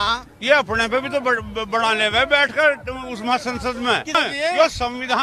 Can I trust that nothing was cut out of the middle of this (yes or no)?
no